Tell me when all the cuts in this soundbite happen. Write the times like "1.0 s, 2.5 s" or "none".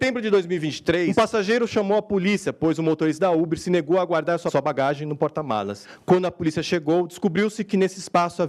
1.1 s, 4.5 s, 5.8 s